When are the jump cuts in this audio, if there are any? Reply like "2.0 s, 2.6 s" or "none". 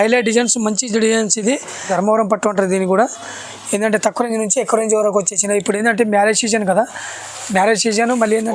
1.9 s